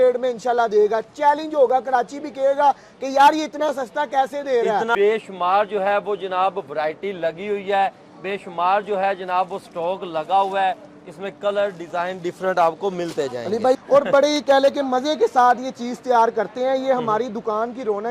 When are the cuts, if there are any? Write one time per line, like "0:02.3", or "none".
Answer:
0:04.9
0:13.8